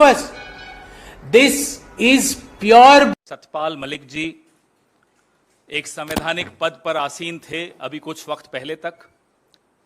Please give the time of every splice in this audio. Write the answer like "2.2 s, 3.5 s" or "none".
3.1 s